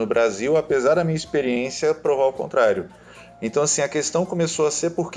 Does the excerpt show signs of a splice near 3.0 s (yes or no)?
no